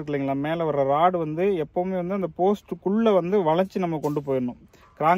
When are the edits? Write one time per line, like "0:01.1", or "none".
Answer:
none